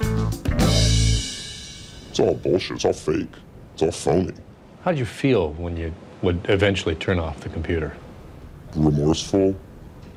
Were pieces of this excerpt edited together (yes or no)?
no